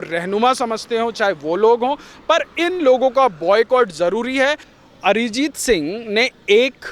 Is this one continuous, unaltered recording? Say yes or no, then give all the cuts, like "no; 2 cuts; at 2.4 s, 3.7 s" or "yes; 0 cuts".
no; 1 cut; at 4.7 s